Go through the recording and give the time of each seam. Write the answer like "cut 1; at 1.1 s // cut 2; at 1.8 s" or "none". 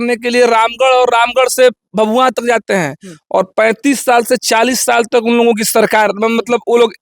none